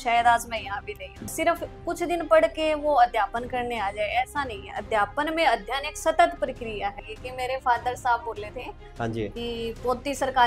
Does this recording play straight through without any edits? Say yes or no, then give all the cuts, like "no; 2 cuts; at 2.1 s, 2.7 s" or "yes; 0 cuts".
no; 2 cuts; at 1.3 s, 7.0 s